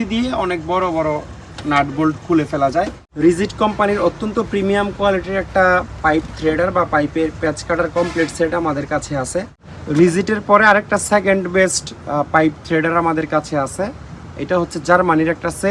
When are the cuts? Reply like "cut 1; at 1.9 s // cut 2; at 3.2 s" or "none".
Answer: cut 1; at 3.0 s // cut 2; at 9.7 s